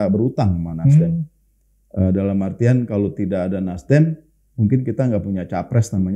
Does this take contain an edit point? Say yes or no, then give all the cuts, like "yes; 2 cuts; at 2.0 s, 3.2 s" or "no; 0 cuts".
no; 0 cuts